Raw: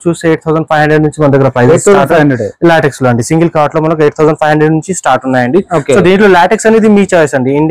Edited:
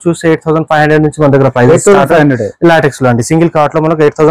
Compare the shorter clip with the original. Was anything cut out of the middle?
no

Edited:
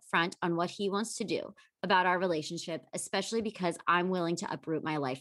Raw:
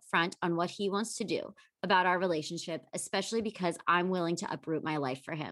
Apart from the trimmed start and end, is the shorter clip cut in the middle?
no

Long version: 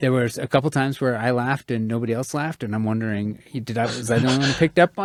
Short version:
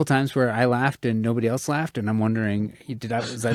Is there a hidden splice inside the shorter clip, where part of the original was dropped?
no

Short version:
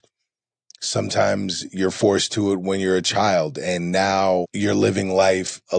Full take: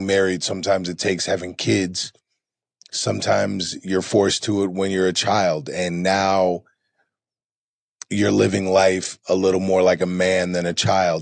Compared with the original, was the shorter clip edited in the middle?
yes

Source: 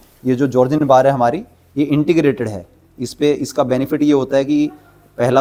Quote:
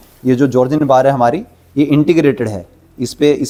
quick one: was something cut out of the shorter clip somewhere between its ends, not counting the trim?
no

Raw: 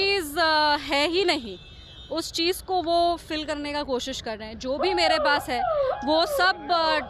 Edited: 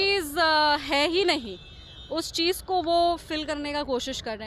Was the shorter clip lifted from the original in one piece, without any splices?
yes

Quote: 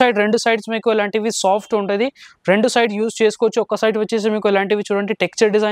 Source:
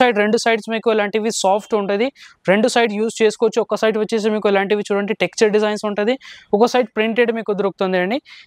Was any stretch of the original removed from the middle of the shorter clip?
no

